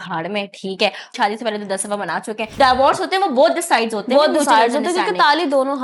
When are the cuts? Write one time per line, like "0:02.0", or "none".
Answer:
0:01.1
0:02.5